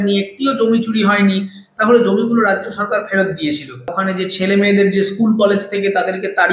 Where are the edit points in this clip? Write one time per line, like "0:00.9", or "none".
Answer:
0:04.0